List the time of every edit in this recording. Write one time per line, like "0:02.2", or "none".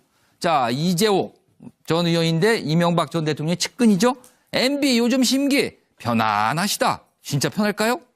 0:03.4